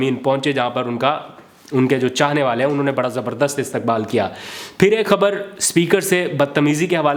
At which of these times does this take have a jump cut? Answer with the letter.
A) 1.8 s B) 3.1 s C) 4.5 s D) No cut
D